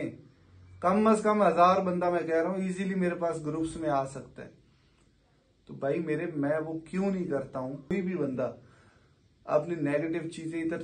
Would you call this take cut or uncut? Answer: cut